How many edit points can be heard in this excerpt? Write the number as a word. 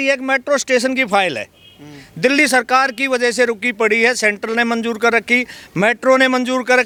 zero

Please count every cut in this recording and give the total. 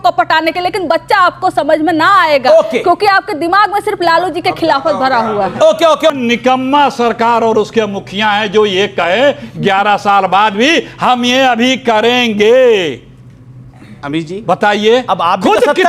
one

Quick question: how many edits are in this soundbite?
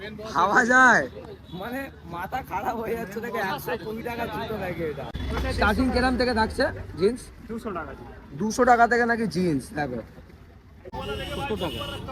two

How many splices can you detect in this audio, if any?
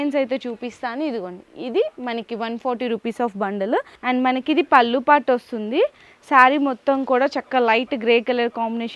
one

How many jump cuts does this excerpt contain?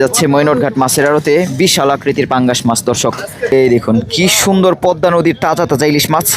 one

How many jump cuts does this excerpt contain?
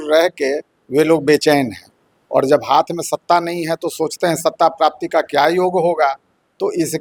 zero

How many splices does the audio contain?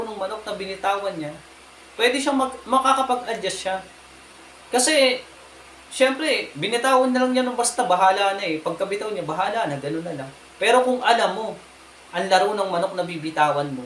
zero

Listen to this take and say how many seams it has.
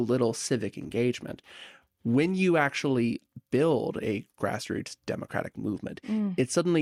zero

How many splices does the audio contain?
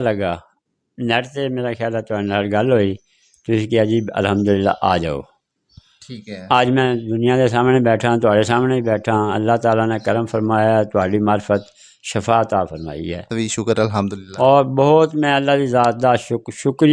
one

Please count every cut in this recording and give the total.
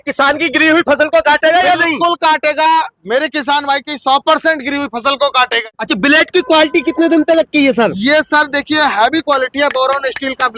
one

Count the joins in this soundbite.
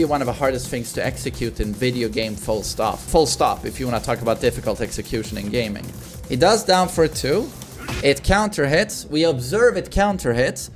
two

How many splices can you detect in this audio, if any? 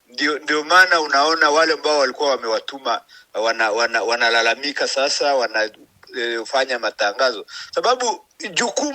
zero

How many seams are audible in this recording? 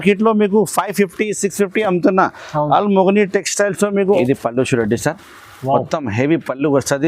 one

